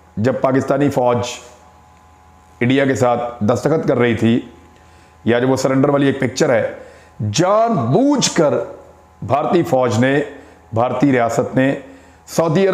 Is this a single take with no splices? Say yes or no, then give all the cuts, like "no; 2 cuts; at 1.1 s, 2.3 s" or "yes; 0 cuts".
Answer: yes; 0 cuts